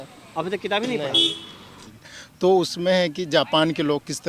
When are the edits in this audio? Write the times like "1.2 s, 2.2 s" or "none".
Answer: 1.6 s